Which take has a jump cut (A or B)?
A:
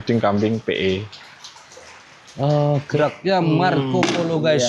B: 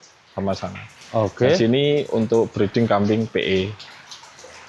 A